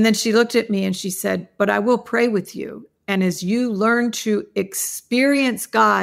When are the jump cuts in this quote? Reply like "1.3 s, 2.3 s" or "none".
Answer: none